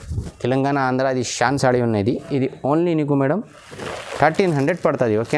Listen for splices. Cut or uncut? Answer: uncut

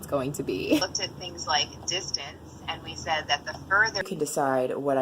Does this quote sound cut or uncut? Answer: cut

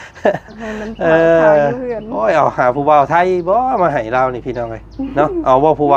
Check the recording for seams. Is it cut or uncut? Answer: uncut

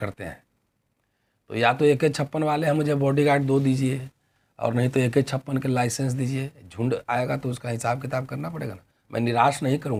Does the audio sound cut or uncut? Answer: uncut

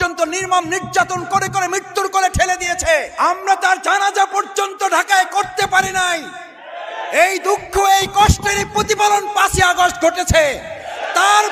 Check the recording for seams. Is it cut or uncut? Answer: cut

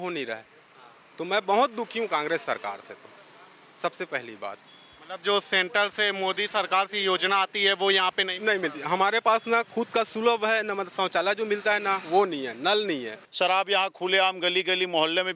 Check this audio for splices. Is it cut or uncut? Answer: cut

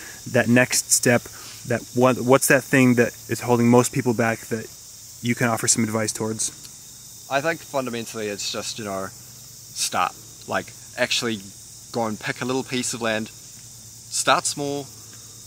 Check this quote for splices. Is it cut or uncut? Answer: uncut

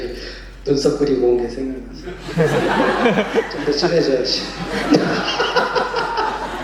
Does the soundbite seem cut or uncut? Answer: uncut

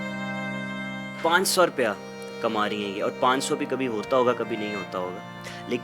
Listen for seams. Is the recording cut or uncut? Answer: uncut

